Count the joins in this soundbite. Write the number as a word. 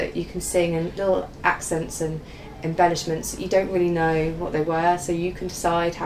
zero